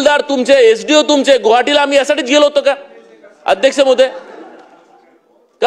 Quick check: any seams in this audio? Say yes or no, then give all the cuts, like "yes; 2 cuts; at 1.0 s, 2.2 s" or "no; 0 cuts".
no; 0 cuts